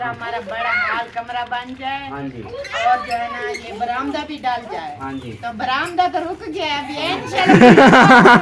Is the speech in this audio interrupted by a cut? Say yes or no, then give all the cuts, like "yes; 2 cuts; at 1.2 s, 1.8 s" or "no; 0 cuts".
no; 0 cuts